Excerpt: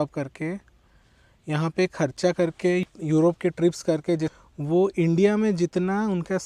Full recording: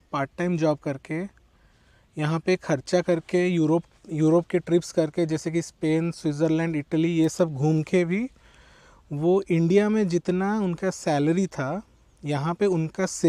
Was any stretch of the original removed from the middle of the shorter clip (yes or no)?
yes